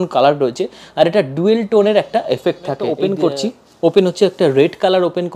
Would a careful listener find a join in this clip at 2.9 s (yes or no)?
yes